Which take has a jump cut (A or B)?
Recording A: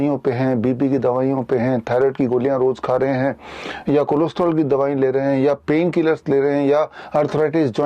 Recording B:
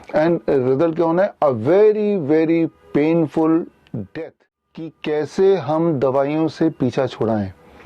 B